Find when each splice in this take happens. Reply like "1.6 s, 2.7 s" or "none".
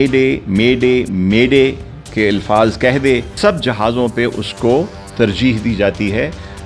none